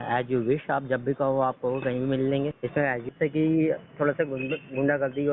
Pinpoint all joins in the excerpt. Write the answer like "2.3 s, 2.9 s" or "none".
3.0 s

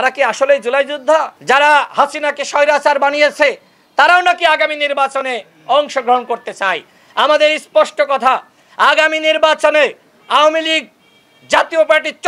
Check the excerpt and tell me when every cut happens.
1.3 s

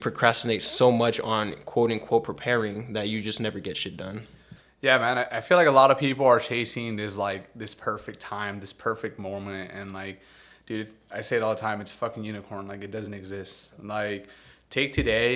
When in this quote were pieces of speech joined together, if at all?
none

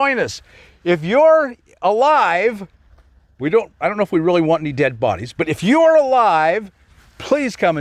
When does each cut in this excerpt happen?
none

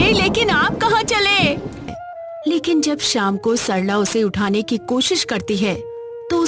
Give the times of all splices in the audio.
2.0 s

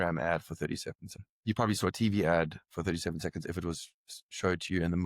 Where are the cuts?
1.3 s

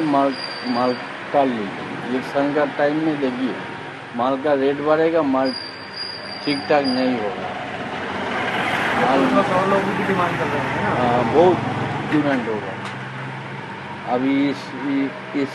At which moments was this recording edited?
none

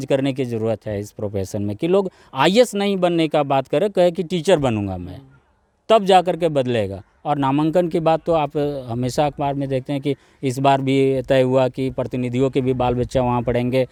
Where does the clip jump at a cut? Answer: none

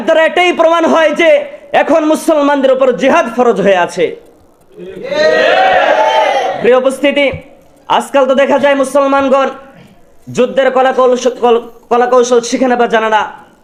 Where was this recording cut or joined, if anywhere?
none

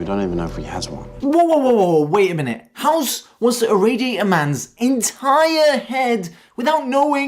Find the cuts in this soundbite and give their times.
1.0 s

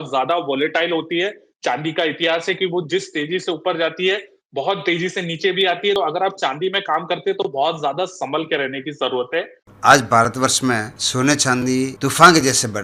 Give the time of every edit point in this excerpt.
6.0 s, 9.6 s, 11.0 s, 11.9 s

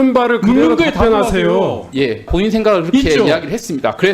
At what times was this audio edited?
2.3 s

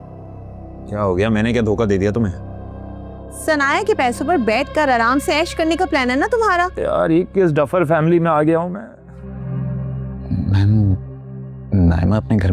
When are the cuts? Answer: 9.2 s

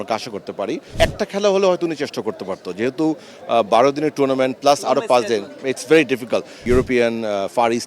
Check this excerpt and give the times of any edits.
0.9 s, 6.5 s

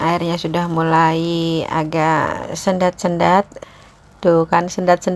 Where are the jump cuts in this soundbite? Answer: 3.6 s

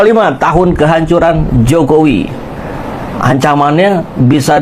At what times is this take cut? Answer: none

